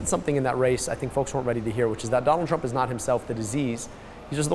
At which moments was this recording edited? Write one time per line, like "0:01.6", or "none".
none